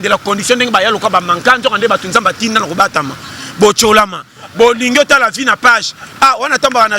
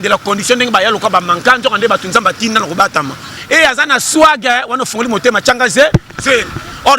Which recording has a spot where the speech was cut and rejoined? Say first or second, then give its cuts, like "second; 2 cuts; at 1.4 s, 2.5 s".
second; 1 cut; at 3.4 s